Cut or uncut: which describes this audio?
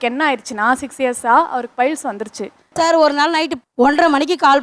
cut